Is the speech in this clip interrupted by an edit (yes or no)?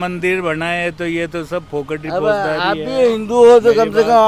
no